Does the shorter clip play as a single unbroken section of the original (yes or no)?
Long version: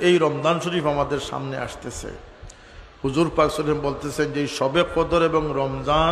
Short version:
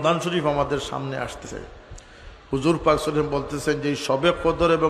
no